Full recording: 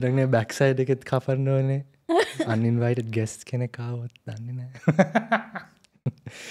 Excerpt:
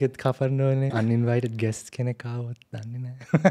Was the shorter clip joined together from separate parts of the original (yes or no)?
yes